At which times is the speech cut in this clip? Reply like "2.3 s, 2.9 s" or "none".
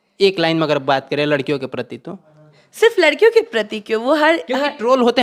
none